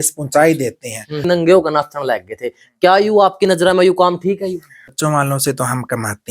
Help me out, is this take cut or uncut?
cut